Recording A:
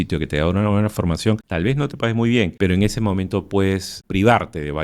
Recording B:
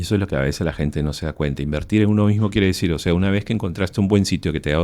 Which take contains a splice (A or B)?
A